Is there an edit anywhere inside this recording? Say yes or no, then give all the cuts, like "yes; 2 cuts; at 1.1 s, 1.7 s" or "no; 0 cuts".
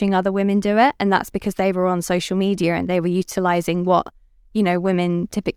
no; 0 cuts